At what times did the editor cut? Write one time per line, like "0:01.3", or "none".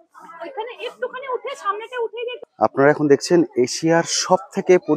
0:02.4